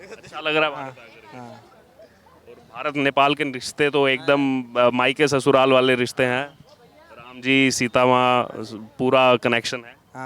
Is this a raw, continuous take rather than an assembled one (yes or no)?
yes